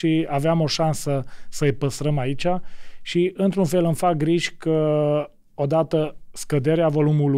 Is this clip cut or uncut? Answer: uncut